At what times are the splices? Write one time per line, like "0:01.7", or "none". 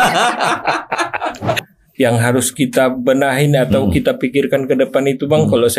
0:01.6